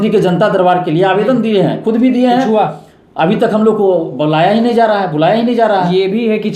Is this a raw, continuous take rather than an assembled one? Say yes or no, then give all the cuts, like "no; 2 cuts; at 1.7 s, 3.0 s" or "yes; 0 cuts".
yes; 0 cuts